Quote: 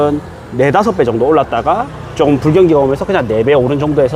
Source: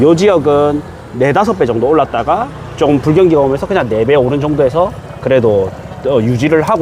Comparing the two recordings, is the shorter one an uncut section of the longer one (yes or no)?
yes